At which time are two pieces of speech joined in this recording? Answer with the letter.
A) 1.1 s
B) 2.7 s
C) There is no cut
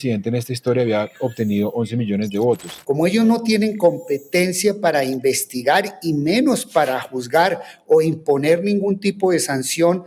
B